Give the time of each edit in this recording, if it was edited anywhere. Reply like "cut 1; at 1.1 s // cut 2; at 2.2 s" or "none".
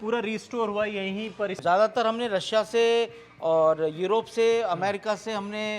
cut 1; at 1.5 s